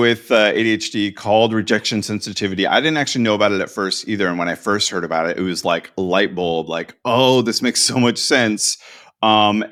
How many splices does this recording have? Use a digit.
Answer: 0